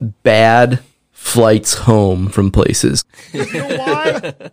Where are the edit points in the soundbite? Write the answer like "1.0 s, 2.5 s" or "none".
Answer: 3.0 s